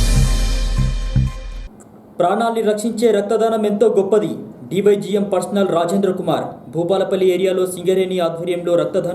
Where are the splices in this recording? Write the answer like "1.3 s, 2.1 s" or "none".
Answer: 1.5 s